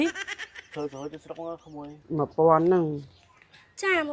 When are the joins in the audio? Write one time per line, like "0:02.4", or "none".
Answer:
0:02.0

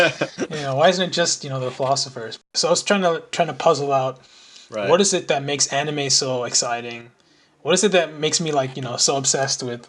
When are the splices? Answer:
0:02.4

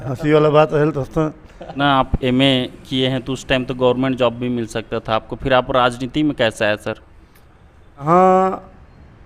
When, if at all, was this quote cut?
0:01.7
0:08.0

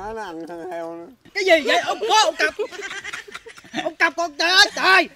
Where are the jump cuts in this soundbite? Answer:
0:01.2

